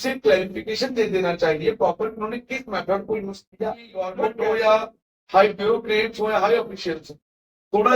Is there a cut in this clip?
yes; 1 cut; at 4.1 s

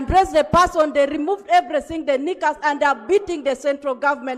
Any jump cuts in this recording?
no; 0 cuts

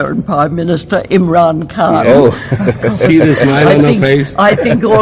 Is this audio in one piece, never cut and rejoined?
yes; 0 cuts

